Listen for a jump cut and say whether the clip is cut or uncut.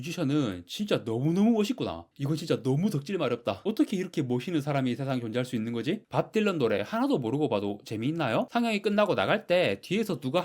cut